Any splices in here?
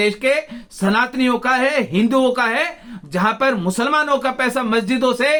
no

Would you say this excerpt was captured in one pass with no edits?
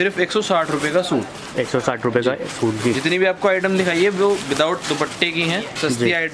yes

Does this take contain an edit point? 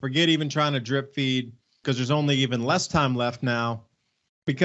yes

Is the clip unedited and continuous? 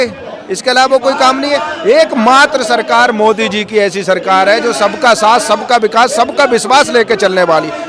yes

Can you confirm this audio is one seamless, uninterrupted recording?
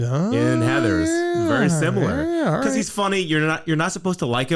yes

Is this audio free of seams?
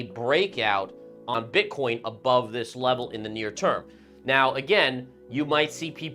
no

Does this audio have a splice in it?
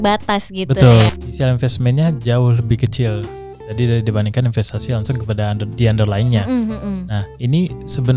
yes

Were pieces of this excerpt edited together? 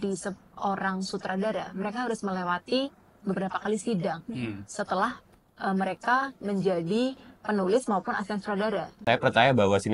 yes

